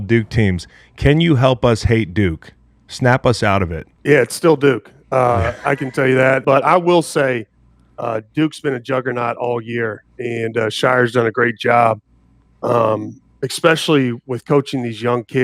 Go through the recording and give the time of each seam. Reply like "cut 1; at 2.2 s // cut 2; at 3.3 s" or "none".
cut 1; at 3.9 s // cut 2; at 6.4 s